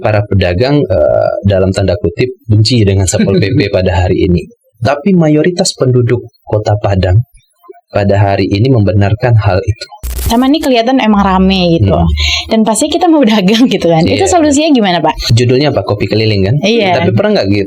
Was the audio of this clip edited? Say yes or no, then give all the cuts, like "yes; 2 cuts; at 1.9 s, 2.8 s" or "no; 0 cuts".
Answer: yes; 2 cuts; at 10.2 s, 15.3 s